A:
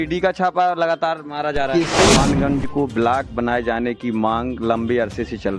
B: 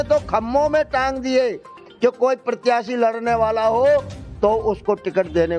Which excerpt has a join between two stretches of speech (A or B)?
A